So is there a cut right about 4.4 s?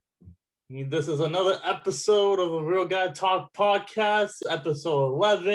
yes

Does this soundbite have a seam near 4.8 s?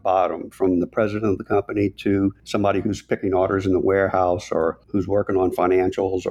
yes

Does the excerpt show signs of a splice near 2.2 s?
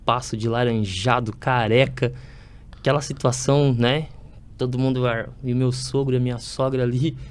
no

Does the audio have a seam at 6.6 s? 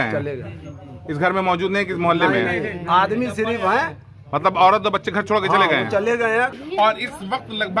yes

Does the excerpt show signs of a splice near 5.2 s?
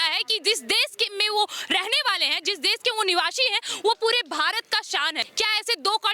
yes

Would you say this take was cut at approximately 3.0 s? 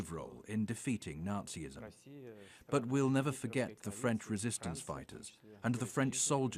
no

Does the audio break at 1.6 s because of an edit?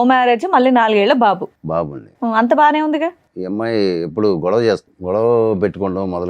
no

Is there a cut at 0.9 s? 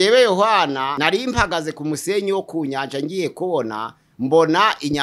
yes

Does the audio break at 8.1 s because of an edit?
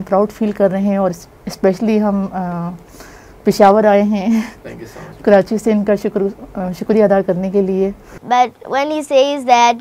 yes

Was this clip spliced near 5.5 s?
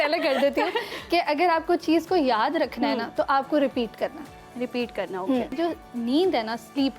yes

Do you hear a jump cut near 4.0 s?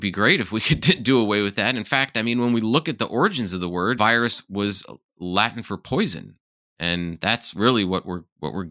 yes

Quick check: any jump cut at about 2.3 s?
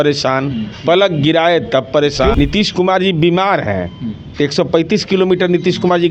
yes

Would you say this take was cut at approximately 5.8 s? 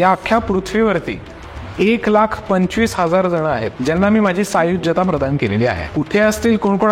yes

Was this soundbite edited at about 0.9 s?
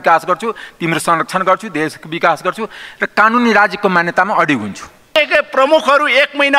no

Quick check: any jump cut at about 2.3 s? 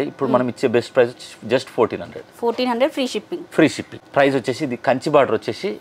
no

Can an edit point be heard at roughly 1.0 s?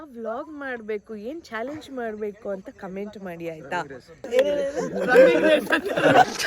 no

